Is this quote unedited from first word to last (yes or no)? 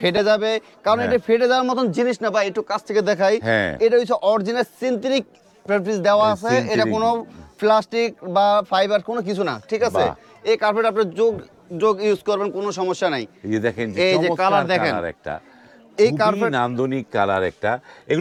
yes